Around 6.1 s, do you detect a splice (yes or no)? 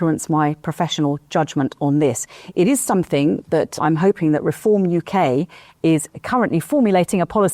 no